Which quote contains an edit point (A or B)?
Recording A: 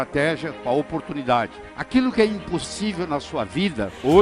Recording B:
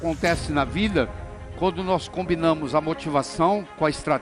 A